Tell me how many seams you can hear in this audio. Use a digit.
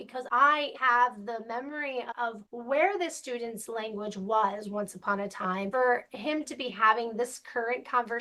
2